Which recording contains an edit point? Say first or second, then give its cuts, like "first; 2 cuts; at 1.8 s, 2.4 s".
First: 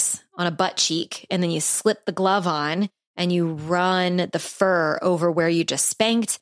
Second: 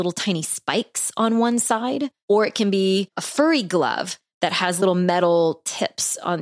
second; 3 cuts; at 2.1 s, 3.2 s, 4.8 s